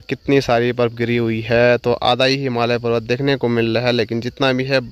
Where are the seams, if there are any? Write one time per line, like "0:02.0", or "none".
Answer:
none